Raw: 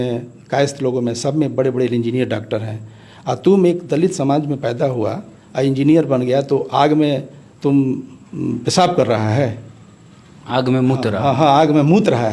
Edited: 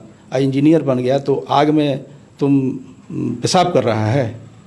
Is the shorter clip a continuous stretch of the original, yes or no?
yes